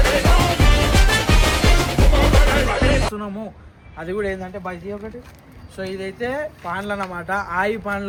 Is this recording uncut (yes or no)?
yes